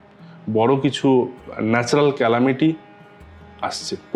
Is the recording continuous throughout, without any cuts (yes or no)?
yes